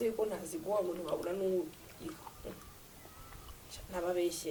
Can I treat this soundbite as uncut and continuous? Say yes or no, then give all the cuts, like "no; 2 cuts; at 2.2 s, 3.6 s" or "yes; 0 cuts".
yes; 0 cuts